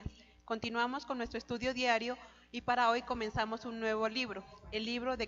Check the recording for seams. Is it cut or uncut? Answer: uncut